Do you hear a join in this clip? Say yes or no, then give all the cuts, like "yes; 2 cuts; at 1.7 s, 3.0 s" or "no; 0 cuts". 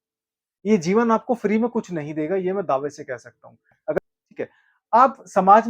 yes; 1 cut; at 4.0 s